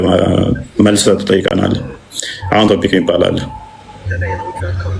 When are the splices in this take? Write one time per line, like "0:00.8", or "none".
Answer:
none